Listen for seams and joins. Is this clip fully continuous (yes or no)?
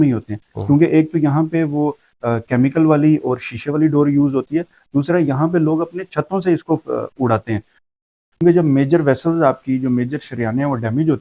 no